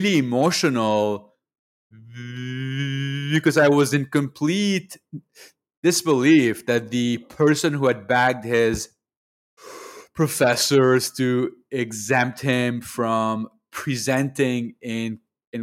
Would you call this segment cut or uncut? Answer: uncut